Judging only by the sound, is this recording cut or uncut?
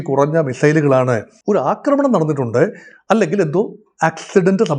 cut